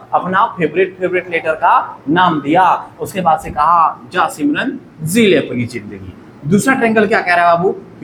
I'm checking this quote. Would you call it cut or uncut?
uncut